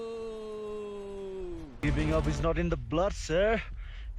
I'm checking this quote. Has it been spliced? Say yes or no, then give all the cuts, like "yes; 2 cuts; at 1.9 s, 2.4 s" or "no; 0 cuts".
yes; 1 cut; at 1.7 s